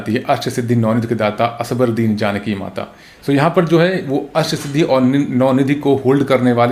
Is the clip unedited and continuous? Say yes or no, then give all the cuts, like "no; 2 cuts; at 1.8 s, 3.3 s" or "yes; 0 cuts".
yes; 0 cuts